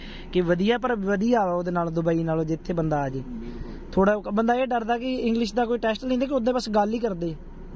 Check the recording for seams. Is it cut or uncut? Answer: uncut